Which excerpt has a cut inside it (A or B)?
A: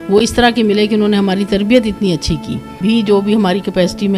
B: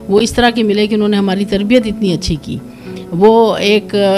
A